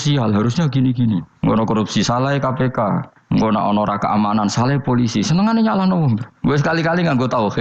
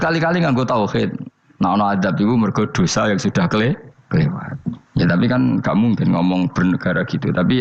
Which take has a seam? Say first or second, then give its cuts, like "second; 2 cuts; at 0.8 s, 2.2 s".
first; 2 cuts; at 1.3 s, 3.1 s